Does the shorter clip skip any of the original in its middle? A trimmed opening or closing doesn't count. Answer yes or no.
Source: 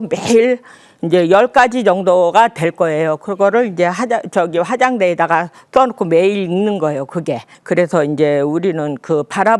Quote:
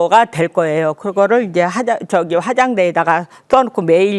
no